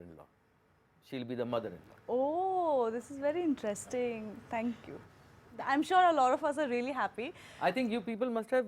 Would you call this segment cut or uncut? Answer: uncut